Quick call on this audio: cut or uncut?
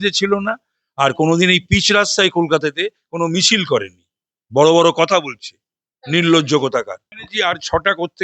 cut